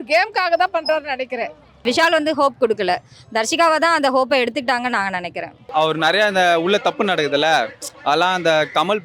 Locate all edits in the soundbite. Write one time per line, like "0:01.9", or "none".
0:01.8
0:05.6